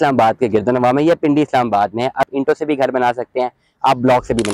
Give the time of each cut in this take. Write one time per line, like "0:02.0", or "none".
0:02.3